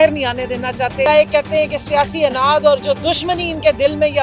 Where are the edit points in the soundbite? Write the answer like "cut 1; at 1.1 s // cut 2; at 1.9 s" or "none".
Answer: cut 1; at 1.1 s